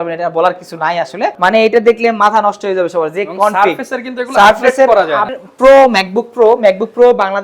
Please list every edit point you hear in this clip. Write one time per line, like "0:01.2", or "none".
0:01.4
0:05.4